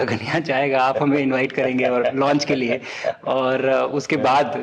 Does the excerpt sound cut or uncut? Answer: uncut